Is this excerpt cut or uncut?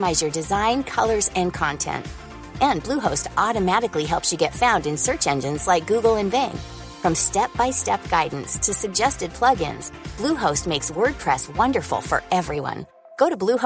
uncut